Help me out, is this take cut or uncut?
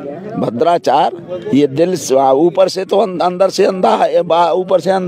uncut